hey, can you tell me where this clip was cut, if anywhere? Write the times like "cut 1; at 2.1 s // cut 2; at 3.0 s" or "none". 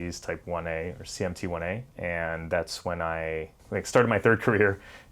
cut 1; at 1.9 s // cut 2; at 3.6 s

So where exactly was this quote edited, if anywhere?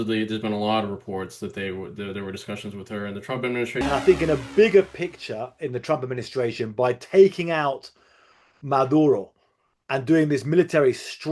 cut 1; at 3.8 s

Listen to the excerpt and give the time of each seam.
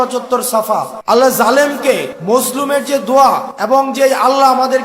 cut 1; at 0.9 s // cut 2; at 2.1 s // cut 3; at 3.5 s

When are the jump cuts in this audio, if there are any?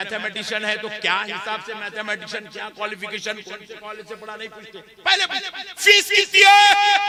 none

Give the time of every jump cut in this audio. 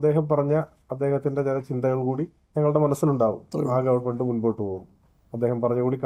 none

